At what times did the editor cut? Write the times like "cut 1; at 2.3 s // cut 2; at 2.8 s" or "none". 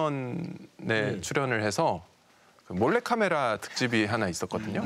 none

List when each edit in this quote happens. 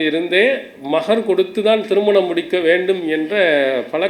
none

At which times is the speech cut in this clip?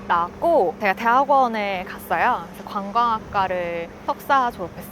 cut 1; at 0.8 s // cut 2; at 3.9 s

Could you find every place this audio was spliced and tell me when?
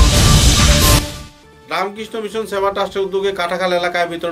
none

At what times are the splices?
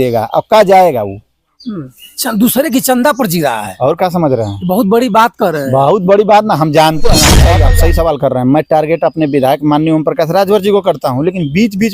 cut 1; at 7.5 s

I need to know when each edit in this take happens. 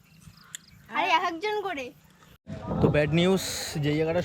cut 1; at 2.6 s

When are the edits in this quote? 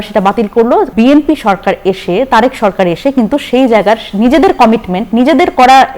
cut 1; at 0.9 s

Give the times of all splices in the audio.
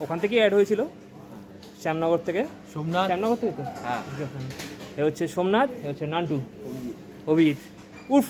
none

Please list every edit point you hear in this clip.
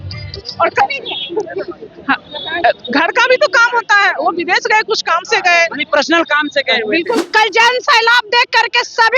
cut 1; at 7.2 s

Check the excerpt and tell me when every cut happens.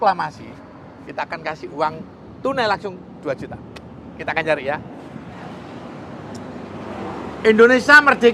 cut 1; at 5.3 s

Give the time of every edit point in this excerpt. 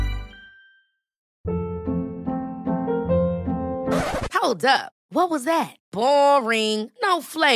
cut 1; at 1.2 s

